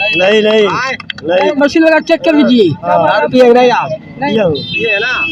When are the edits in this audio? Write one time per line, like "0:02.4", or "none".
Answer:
0:01.5
0:02.8
0:04.3